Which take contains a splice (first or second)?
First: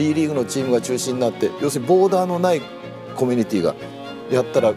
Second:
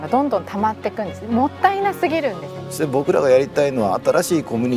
second